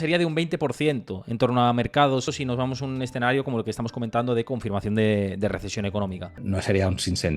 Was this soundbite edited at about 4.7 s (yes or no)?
no